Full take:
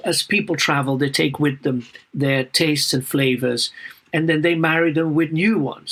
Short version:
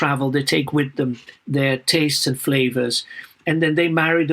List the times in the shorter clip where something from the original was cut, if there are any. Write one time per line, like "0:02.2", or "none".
none